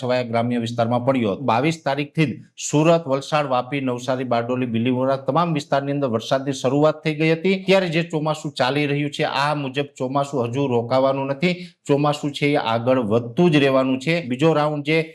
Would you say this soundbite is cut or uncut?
cut